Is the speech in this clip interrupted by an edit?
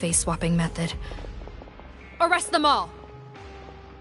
no; 0 cuts

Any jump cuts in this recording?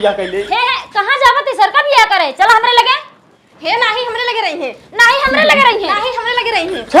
no; 0 cuts

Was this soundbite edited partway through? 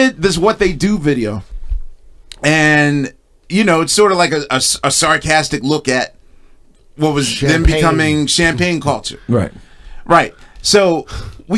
no; 0 cuts

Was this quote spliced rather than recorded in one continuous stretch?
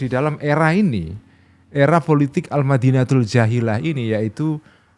no; 0 cuts

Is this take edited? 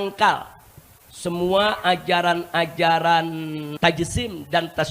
yes; 1 cut; at 3.6 s

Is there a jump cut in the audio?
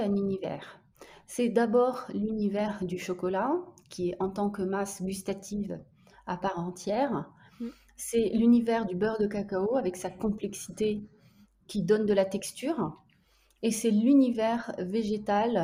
no; 0 cuts

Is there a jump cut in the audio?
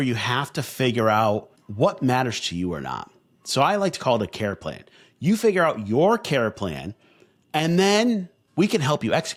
no; 0 cuts

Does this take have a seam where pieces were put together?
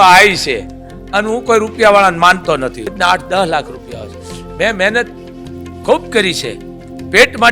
yes; 1 cut; at 2.9 s

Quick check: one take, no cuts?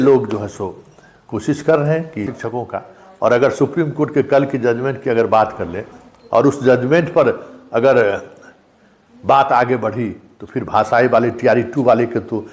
no; 1 cut; at 2.3 s

